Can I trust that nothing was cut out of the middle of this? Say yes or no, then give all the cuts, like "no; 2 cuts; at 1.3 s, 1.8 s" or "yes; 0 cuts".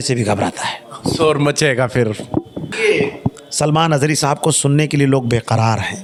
yes; 0 cuts